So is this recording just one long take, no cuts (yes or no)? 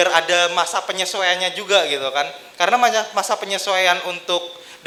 yes